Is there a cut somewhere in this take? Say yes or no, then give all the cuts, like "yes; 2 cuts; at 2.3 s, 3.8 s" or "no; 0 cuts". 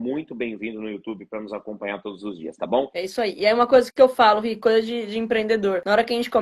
yes; 1 cut; at 2.9 s